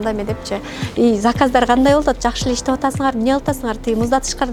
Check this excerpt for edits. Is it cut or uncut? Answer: uncut